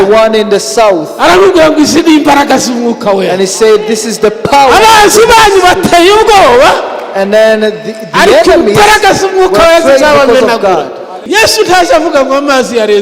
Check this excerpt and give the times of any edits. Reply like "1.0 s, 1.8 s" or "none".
11.2 s